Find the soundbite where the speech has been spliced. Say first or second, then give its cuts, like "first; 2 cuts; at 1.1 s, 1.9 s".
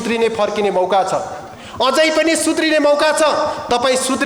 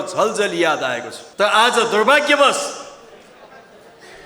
second; 1 cut; at 1.2 s